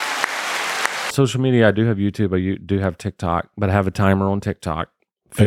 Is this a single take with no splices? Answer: no; 1 cut; at 1.1 s

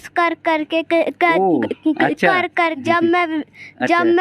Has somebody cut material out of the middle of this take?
yes; 1 cut; at 2.8 s

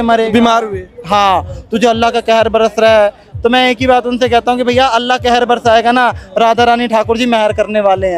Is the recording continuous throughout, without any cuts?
yes; 0 cuts

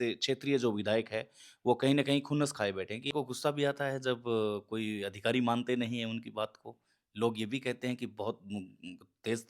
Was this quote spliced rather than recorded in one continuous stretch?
yes; 1 cut; at 3.1 s

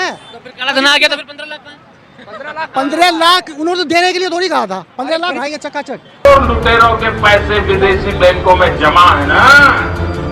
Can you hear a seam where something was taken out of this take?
yes; 1 cut; at 5.4 s

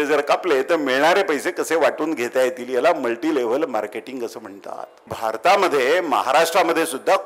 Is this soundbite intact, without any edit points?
no; 1 cut; at 5.1 s

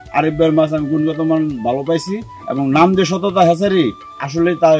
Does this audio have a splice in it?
no; 0 cuts

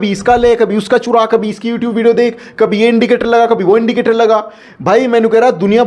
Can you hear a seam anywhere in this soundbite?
no; 0 cuts

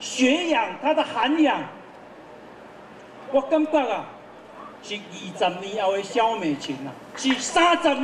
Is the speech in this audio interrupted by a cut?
yes; 1 cut; at 7.0 s

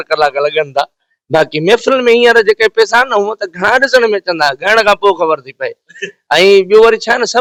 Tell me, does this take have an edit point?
no; 0 cuts

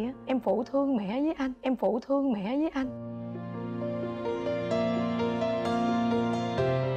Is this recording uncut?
yes; 0 cuts

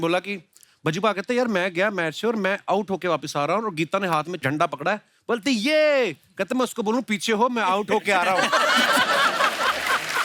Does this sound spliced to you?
no; 0 cuts

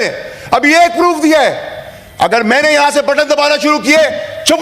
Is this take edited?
no; 0 cuts

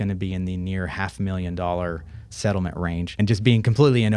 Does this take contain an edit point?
yes; 1 cut; at 3.2 s

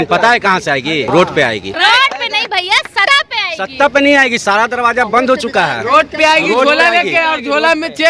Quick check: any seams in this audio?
yes; 3 cuts; at 1.1 s, 1.7 s, 3.0 s

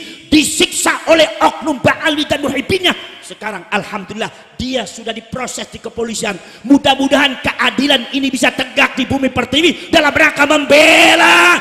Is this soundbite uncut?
yes; 0 cuts

